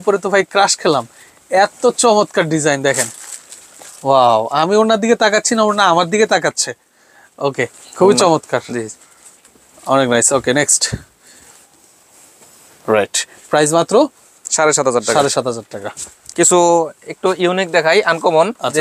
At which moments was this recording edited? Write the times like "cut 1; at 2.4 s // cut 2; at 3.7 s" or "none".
none